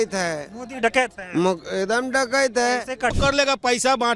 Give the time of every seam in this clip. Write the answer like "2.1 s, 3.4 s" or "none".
3.1 s